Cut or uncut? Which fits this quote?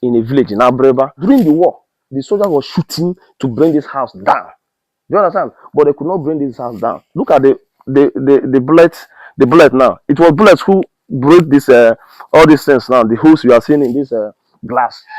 cut